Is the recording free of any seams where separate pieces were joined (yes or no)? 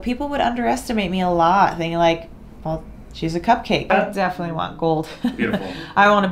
no